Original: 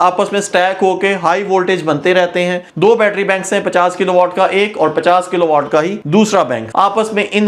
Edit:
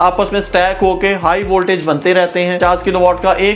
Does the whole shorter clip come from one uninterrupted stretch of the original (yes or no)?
no